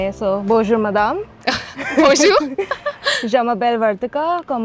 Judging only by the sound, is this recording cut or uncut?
uncut